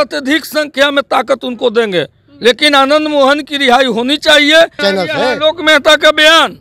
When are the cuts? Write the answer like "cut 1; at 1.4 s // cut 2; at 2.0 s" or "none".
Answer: cut 1; at 4.8 s

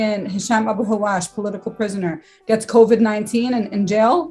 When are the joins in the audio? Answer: none

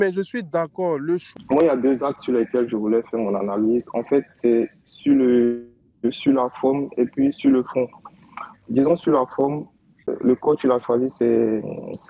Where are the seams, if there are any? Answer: cut 1; at 1.3 s // cut 2; at 8.6 s // cut 3; at 10.1 s

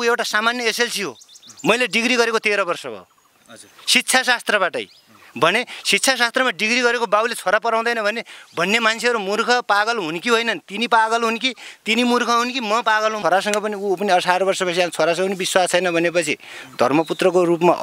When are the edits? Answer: cut 1; at 13.2 s

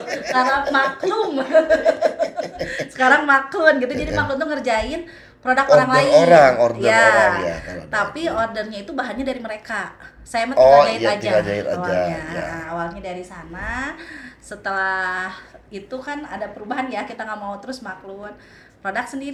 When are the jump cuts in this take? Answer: none

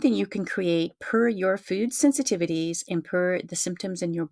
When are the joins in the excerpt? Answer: none

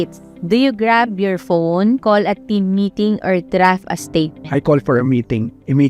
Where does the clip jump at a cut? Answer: cut 1; at 2.0 s

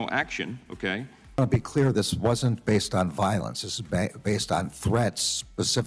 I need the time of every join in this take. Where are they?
cut 1; at 1.2 s

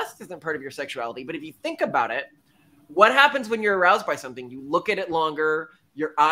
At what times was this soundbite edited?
none

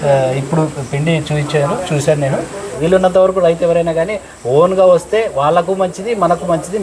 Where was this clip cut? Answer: cut 1; at 2.7 s

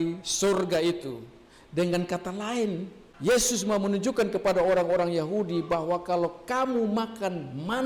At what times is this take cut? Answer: none

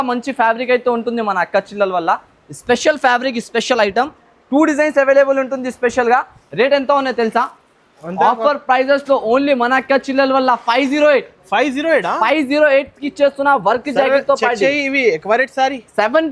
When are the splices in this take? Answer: none

